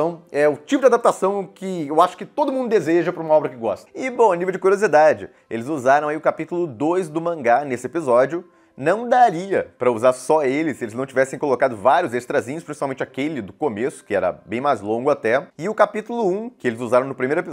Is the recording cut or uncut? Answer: uncut